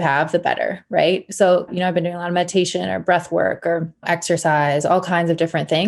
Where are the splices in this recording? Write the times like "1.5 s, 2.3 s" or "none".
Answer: 1.7 s, 4.0 s